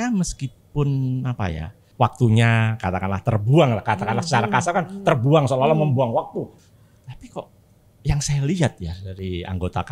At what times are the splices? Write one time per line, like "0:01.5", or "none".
0:01.8
0:06.5

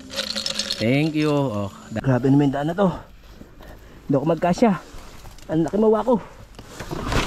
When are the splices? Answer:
0:01.8

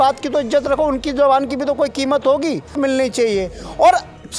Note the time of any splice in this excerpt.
0:02.8

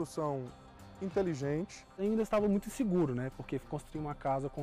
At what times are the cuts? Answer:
0:01.9

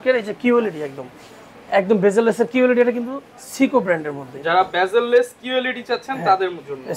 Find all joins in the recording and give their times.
none

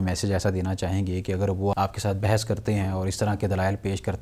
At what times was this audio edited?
0:01.7

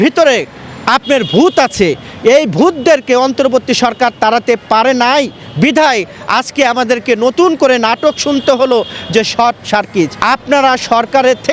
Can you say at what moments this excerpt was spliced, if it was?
0:10.2

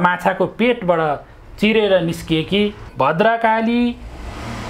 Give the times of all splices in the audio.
0:02.8

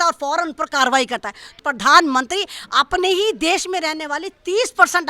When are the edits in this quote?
0:01.5

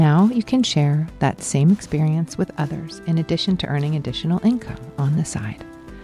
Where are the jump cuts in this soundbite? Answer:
none

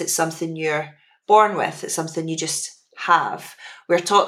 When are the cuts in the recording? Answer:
none

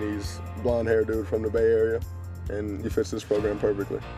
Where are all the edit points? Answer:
0:02.6

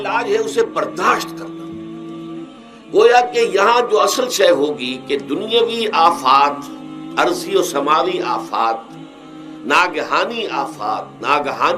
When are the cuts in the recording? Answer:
0:01.2
0:02.9

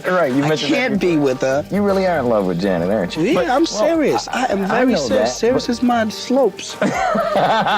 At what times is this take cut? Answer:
0:01.7
0:03.2

